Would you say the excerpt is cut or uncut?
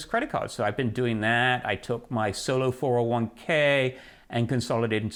uncut